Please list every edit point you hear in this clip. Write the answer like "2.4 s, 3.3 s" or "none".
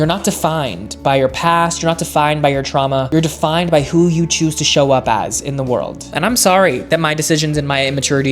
6.1 s